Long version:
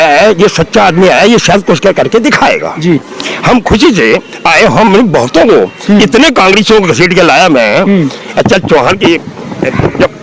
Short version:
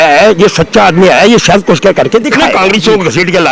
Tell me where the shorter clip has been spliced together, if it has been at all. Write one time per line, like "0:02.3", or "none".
0:02.4